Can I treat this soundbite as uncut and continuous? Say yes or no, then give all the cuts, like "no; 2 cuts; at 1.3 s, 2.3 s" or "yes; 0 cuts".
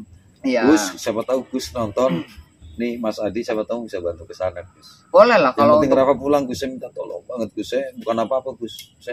yes; 0 cuts